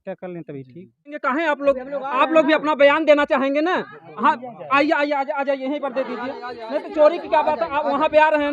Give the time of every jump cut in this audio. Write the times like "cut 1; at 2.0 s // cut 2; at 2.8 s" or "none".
cut 1; at 1.2 s